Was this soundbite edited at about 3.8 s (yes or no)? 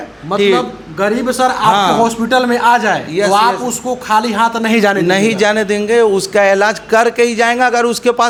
no